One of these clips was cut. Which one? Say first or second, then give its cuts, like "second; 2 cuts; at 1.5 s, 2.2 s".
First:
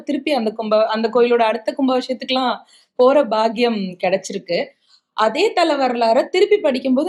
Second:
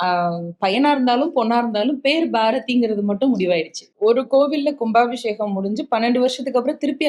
second; 1 cut; at 3.8 s